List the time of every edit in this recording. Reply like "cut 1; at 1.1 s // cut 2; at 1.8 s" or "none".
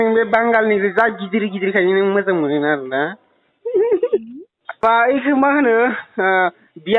cut 1; at 4.8 s